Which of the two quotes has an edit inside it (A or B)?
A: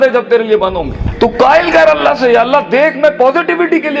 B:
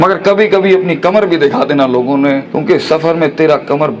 A